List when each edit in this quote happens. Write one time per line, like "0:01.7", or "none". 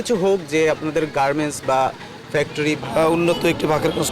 0:02.8